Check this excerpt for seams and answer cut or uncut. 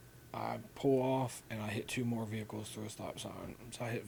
uncut